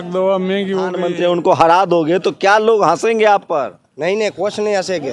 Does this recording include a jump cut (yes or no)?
yes